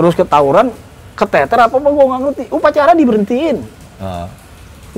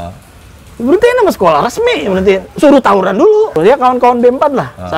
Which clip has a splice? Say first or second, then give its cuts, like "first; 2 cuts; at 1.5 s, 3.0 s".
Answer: second; 1 cut; at 3.6 s